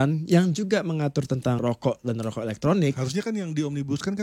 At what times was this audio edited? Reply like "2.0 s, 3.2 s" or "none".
1.6 s, 3.0 s